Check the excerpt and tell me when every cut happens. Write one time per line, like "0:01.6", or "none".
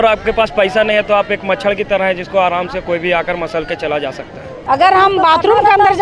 0:04.4